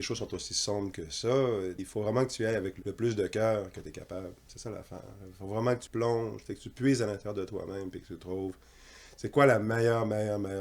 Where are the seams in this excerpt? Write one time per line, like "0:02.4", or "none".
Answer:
0:01.8
0:02.8
0:05.9